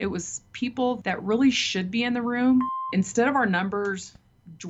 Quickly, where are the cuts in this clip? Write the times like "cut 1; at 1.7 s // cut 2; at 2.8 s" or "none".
cut 1; at 2.7 s